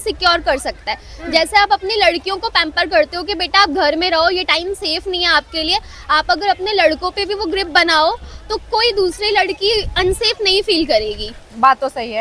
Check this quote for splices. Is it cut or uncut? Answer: uncut